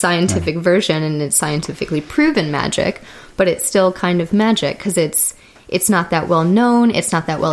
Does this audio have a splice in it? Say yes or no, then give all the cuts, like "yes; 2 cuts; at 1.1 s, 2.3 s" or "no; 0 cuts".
no; 0 cuts